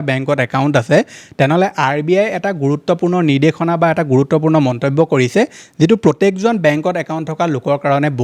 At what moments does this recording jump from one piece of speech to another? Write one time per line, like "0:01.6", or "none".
none